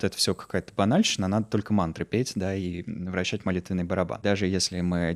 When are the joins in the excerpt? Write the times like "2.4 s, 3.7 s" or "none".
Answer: 4.2 s